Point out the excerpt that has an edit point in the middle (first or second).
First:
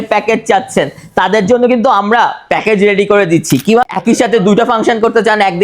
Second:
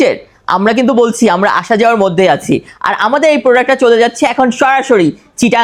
first